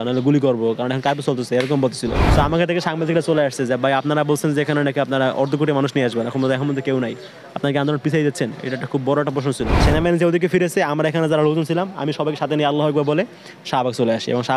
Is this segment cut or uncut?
cut